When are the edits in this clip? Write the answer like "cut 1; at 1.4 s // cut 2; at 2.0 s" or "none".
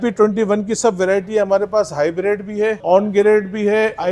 cut 1; at 2.8 s